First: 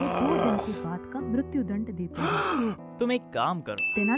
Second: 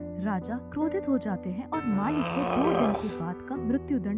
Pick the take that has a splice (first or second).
first